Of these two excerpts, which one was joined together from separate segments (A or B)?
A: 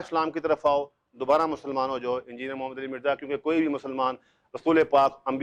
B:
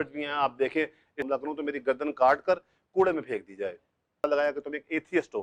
B